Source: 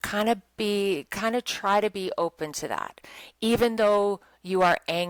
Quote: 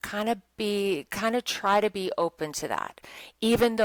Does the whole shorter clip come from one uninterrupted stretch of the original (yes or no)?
yes